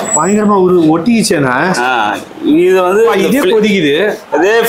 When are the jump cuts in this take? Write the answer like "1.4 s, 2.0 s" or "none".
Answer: none